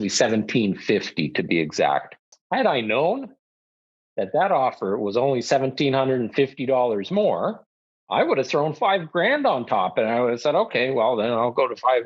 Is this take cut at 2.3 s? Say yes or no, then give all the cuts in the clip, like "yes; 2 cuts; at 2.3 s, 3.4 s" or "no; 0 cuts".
yes; 1 cut; at 2.3 s